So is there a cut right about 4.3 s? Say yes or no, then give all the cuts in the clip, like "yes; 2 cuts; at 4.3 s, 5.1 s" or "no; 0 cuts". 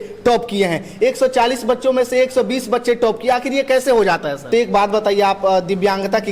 yes; 1 cut; at 4.3 s